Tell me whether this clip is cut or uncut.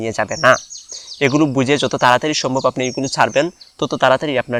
uncut